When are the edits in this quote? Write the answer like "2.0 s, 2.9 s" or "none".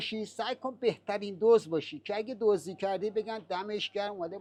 none